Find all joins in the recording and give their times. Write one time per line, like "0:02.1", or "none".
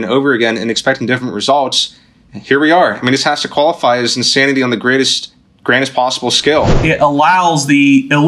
0:06.8